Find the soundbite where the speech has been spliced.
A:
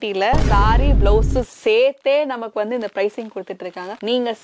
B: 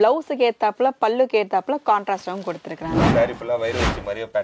B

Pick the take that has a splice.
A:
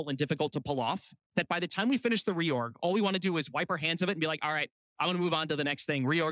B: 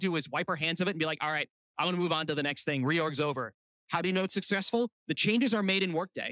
B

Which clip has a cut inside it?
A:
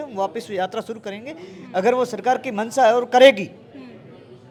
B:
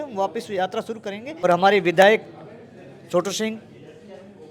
B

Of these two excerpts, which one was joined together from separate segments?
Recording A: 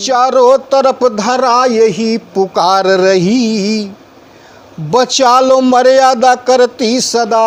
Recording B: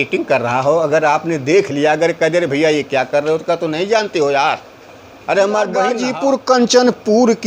B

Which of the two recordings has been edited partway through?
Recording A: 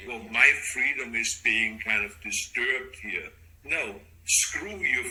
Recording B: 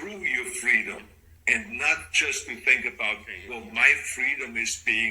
B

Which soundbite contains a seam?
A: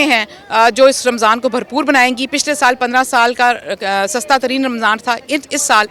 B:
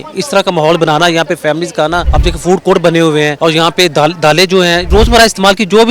B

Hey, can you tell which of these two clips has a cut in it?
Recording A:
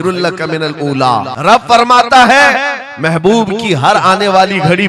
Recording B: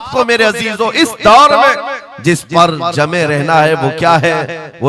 A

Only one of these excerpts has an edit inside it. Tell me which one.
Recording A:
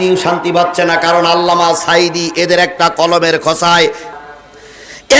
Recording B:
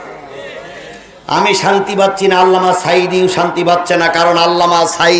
A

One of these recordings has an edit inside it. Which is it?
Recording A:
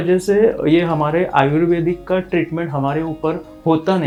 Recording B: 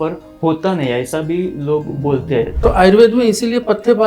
B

